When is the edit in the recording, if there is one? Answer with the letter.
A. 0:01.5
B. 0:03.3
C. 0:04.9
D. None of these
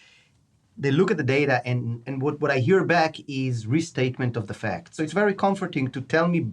C